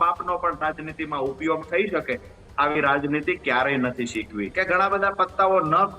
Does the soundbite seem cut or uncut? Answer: cut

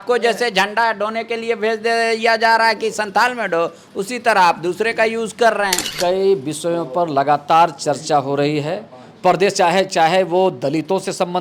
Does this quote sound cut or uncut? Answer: cut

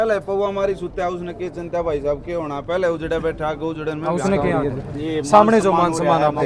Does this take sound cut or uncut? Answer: cut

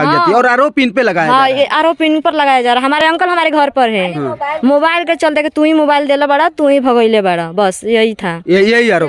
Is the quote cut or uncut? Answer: uncut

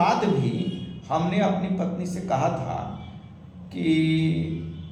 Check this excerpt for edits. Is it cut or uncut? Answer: uncut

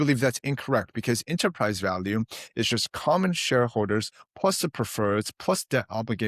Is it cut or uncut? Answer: uncut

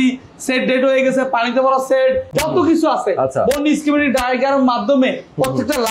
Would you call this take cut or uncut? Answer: cut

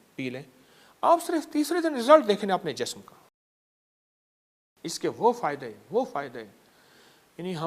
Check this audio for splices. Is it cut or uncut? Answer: uncut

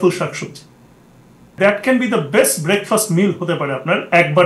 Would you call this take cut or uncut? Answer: cut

